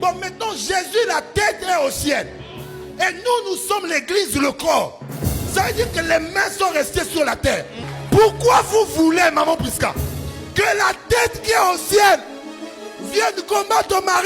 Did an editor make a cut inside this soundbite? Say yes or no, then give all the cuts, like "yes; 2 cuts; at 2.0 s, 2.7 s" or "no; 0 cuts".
yes; 1 cut; at 7.8 s